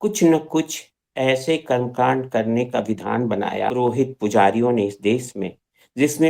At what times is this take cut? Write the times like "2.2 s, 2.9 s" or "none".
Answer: 3.7 s

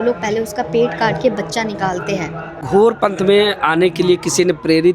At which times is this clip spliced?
2.6 s

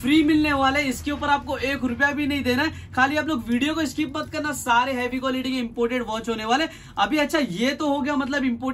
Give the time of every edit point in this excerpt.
none

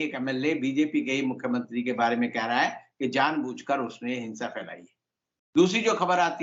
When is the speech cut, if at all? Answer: none

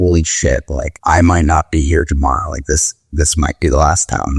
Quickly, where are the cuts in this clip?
0.9 s

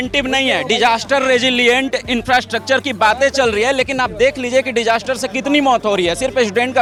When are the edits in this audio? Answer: none

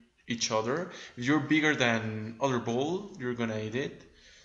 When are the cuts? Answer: 2.2 s

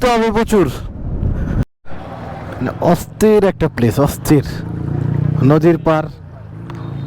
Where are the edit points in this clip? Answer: 1.6 s

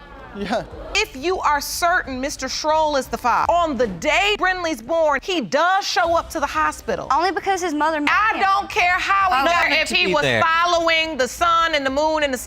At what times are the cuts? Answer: 1.0 s, 4.4 s, 9.6 s

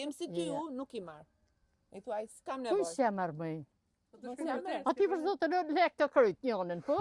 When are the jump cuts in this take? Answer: none

